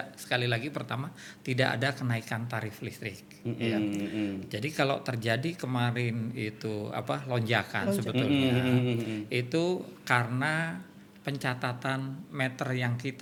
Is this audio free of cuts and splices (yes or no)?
yes